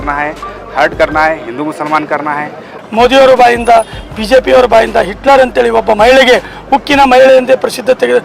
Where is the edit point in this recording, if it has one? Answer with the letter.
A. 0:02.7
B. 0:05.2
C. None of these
A